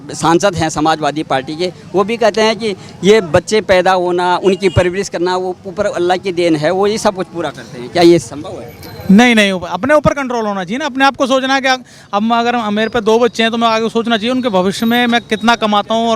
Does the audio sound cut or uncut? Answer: uncut